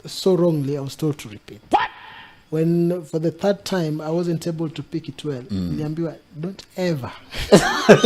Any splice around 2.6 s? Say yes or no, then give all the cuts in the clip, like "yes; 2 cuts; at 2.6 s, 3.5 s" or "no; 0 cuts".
no; 0 cuts